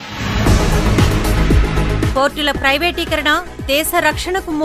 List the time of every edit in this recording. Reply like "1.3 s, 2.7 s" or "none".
none